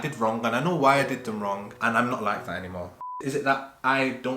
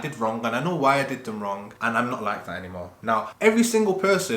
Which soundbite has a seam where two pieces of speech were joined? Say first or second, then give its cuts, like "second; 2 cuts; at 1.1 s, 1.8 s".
first; 1 cut; at 3.0 s